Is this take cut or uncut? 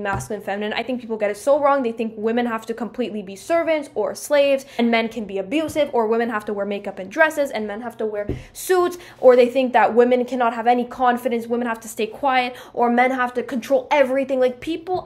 uncut